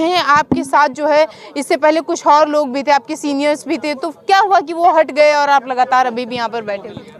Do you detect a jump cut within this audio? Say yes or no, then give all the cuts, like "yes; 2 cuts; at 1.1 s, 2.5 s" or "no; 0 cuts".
no; 0 cuts